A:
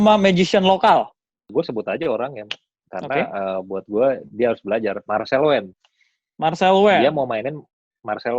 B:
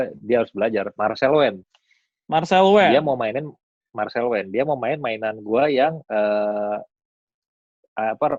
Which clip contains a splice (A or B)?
A